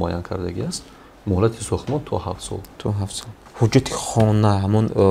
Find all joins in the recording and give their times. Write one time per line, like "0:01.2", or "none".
0:03.4